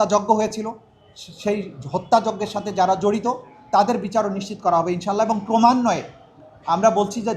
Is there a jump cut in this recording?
no; 0 cuts

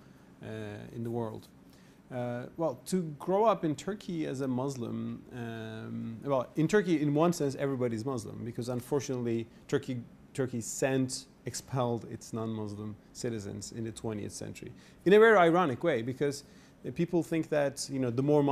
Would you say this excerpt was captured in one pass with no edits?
no; 2 cuts; at 2.8 s, 15.9 s

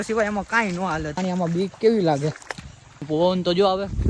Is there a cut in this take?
yes; 2 cuts; at 1.2 s, 3.0 s

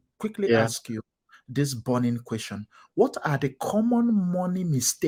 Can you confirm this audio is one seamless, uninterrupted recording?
yes; 0 cuts

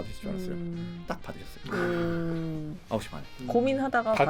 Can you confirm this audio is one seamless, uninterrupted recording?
no; 1 cut; at 1.1 s

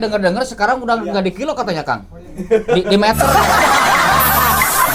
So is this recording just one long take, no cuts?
yes; 0 cuts

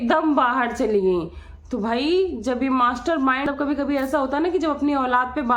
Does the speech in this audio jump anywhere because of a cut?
yes; 1 cut; at 3.5 s

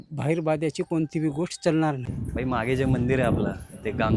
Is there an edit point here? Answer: yes; 1 cut; at 2.2 s

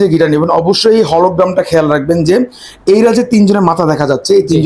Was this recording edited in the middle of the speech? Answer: no; 0 cuts

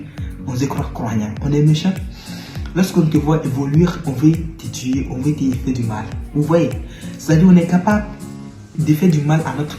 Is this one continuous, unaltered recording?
no; 1 cut; at 8.7 s

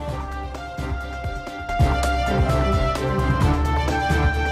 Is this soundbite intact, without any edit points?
no; 1 cut; at 1.6 s

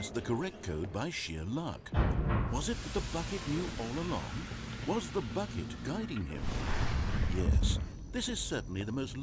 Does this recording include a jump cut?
no; 0 cuts

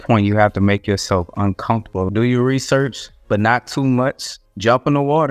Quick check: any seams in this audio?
yes; 1 cut; at 2.1 s

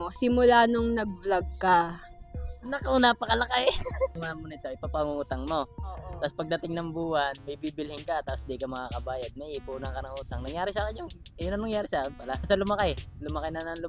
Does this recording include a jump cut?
yes; 2 cuts; at 4.2 s, 12.5 s

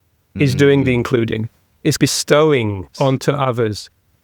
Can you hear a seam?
yes; 1 cut; at 2.8 s

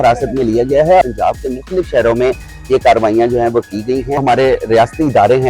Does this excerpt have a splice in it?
yes; 2 cuts; at 1.0 s, 4.2 s

